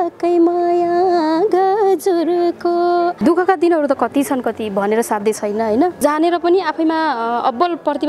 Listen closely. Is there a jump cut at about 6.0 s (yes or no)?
yes